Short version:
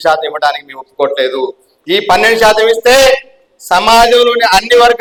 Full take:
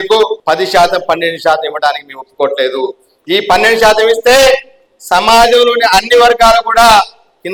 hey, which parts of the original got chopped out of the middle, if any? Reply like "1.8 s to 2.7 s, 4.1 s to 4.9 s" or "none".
none